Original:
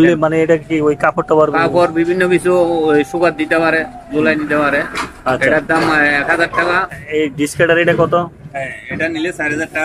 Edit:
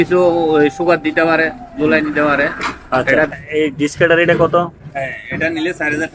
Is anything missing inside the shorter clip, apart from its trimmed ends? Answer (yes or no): yes